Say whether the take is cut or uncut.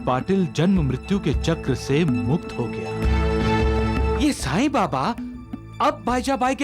cut